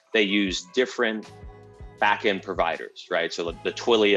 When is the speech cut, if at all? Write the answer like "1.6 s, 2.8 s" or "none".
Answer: none